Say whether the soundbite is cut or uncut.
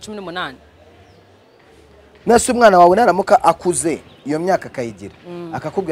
uncut